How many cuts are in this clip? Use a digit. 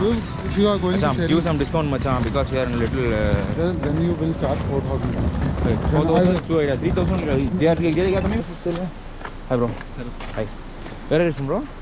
1